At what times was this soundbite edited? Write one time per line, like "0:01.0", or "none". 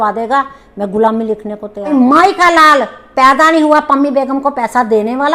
0:01.9